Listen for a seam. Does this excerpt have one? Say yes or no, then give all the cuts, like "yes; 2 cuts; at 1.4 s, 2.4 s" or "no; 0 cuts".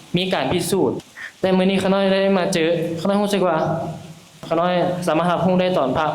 yes; 2 cuts; at 1.0 s, 4.4 s